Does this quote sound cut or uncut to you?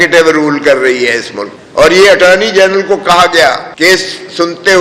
uncut